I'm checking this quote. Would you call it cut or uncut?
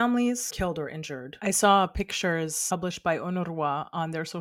cut